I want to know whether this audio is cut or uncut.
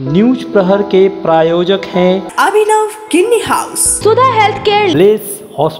cut